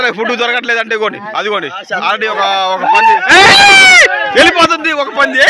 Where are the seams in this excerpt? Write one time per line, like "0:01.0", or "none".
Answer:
0:02.3